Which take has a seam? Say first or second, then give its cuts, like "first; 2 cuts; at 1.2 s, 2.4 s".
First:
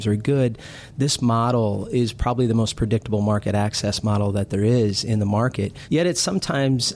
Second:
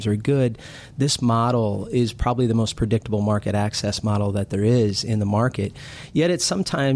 first; 1 cut; at 5.7 s